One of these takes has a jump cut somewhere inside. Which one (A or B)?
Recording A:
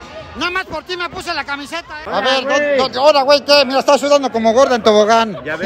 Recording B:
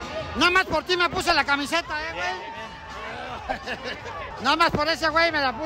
A